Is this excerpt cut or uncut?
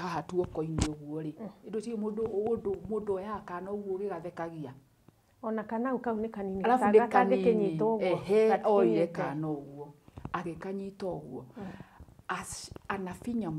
uncut